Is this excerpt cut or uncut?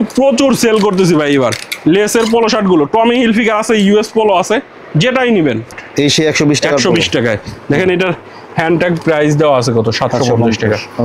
cut